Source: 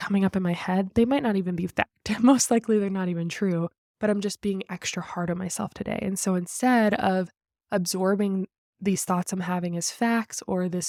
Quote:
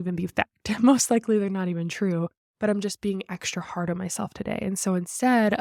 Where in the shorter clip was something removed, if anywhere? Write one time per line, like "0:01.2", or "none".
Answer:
none